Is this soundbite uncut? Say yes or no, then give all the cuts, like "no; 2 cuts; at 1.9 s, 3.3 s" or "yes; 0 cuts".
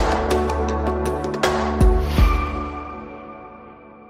yes; 0 cuts